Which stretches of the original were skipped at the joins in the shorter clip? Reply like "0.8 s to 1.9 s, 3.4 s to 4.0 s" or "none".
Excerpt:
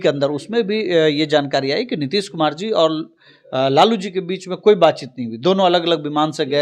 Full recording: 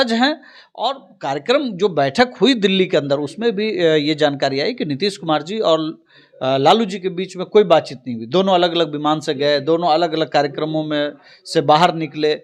none